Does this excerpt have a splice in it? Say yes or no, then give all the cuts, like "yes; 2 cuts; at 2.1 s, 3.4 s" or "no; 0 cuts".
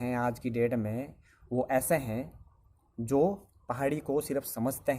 no; 0 cuts